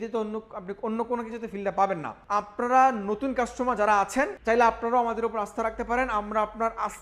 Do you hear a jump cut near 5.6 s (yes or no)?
no